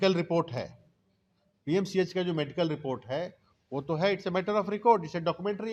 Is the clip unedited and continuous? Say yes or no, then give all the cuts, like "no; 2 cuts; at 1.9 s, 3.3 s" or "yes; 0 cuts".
yes; 0 cuts